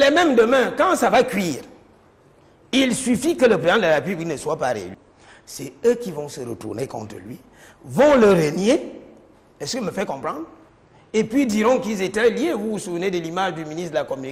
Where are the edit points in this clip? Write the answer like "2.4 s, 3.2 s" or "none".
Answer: none